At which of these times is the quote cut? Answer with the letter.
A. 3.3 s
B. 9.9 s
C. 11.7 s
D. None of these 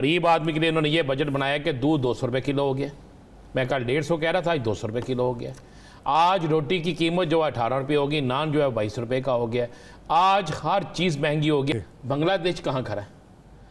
C